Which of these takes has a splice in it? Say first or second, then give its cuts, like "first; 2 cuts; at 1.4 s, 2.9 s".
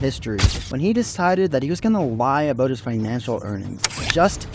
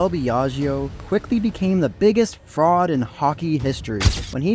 second; 2 cuts; at 0.9 s, 1.9 s